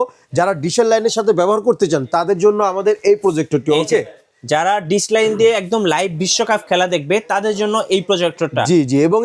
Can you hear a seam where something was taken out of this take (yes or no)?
no